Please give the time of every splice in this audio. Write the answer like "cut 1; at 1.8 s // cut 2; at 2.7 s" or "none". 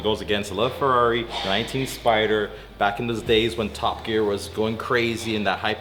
none